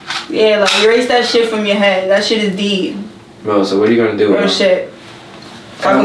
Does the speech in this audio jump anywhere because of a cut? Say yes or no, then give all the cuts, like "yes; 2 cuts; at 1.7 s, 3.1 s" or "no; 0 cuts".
no; 0 cuts